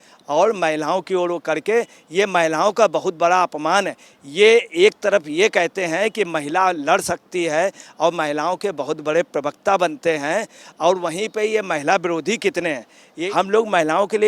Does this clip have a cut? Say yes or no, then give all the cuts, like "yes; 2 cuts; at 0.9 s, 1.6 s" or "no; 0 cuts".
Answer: yes; 1 cut; at 13.2 s